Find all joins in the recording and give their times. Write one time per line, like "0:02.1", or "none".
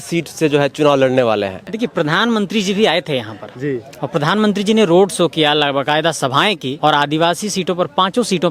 0:01.6
0:06.7